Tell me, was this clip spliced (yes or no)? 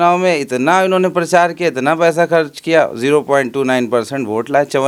no